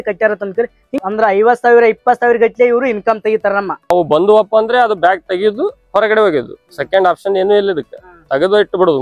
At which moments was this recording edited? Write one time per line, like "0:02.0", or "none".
0:01.0
0:03.9

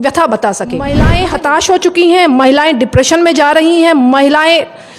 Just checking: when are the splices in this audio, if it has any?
0:01.0

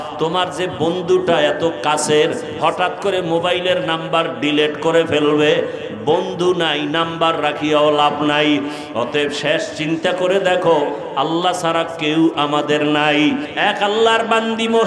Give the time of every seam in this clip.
0:13.5

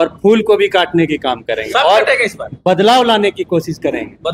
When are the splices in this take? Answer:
none

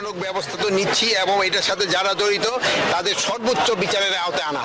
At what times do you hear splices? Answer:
none

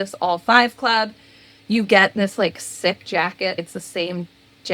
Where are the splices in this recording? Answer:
0:03.6

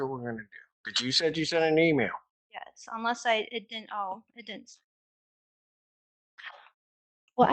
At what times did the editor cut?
0:01.1

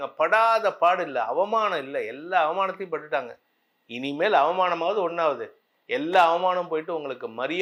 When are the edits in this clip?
none

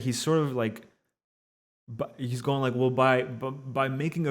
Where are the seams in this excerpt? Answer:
none

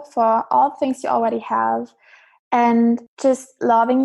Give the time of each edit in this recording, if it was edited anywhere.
0:03.1

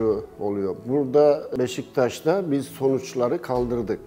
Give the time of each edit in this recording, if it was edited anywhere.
0:01.5

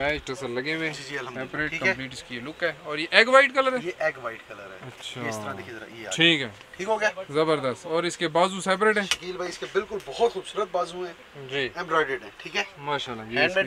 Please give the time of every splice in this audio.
none

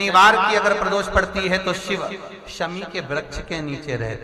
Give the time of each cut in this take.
none

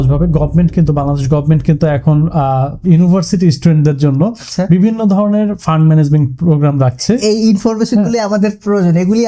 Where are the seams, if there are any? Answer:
none

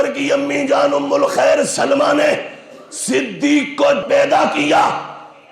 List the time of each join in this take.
0:04.0

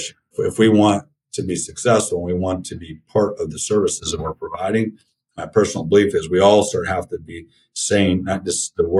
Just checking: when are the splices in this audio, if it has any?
none

